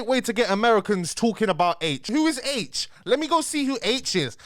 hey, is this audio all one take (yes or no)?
no